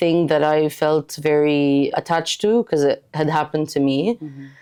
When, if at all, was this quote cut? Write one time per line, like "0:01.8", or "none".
none